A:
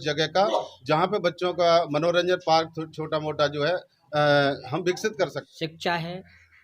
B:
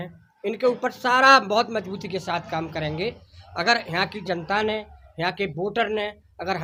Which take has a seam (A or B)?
A